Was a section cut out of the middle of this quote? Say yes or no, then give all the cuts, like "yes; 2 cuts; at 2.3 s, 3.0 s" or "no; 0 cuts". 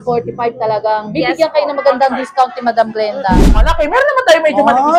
yes; 1 cut; at 3.6 s